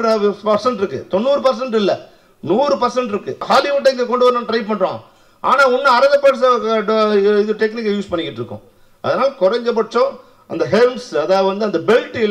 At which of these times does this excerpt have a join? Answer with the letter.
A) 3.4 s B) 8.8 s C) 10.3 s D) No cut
A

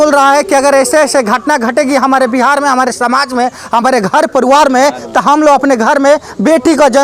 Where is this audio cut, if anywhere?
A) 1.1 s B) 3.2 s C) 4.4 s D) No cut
D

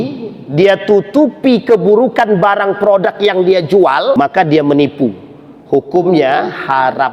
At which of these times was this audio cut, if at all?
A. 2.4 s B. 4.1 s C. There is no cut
B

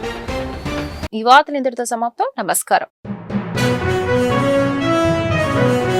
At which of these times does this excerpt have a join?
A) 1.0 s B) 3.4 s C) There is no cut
C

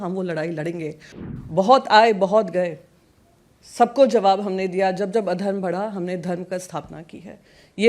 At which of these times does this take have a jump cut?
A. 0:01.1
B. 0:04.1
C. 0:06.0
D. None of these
A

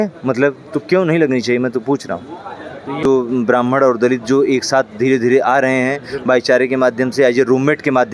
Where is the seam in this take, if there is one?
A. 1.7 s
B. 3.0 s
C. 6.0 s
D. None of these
B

